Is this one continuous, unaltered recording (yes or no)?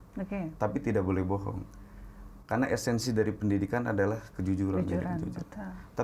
yes